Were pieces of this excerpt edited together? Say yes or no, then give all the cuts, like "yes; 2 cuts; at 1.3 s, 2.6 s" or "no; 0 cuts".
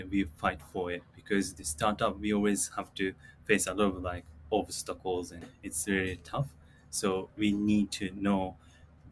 yes; 1 cut; at 5.4 s